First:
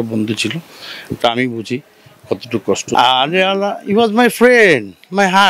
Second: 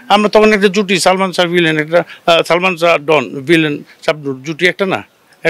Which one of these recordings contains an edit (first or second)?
first